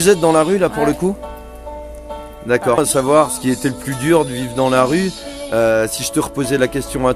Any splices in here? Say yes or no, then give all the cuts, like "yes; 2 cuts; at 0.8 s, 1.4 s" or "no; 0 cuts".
yes; 1 cut; at 2.8 s